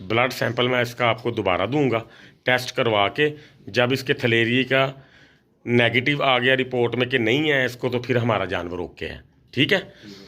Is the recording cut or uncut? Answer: uncut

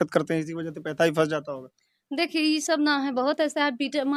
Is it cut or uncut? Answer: uncut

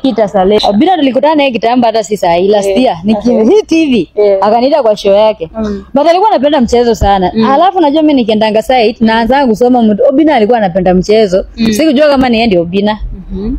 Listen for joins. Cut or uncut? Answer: cut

